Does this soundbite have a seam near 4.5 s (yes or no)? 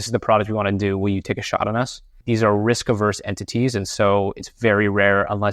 no